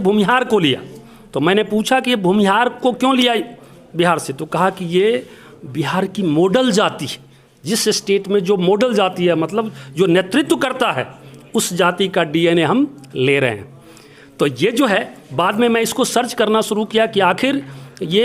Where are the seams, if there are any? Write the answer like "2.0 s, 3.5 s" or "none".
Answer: none